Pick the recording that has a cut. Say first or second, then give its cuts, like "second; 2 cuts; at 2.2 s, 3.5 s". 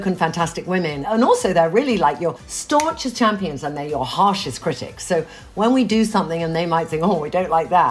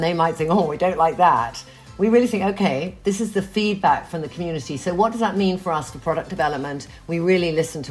first; 1 cut; at 1.0 s